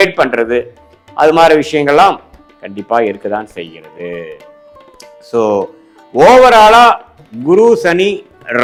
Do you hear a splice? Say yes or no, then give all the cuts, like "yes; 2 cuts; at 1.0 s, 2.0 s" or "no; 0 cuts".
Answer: no; 0 cuts